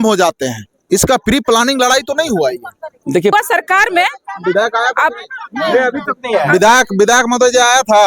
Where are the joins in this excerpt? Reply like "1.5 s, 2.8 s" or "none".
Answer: 3.3 s